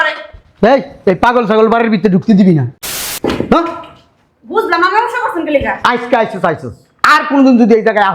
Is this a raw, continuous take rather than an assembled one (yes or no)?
no